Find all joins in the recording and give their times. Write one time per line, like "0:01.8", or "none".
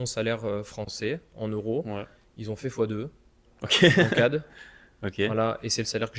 none